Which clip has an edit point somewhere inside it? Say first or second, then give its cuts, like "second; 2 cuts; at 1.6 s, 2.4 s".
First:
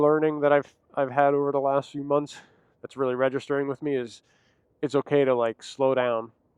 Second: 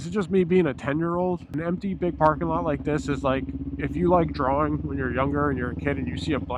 second; 1 cut; at 1.5 s